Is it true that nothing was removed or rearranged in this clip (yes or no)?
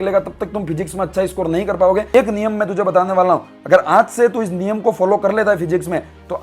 no